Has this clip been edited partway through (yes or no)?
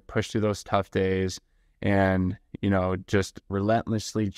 yes